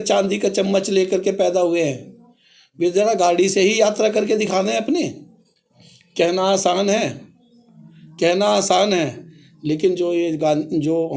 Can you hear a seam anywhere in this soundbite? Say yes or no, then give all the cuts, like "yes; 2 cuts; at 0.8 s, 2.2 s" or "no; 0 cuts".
no; 0 cuts